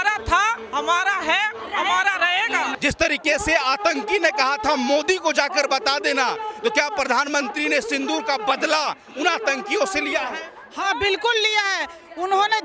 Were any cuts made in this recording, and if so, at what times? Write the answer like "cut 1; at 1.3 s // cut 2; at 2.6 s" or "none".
none